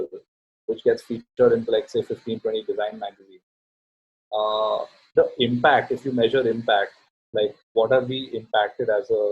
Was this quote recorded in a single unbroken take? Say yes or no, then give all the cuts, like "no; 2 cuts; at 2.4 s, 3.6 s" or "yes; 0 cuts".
yes; 0 cuts